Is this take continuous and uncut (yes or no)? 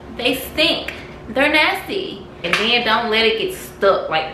no